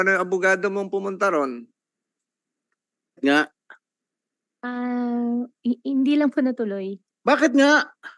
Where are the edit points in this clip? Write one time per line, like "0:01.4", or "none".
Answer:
0:03.2